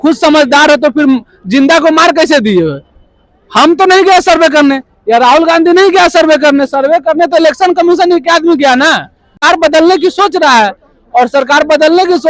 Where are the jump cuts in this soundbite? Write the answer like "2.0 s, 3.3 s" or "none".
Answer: 9.4 s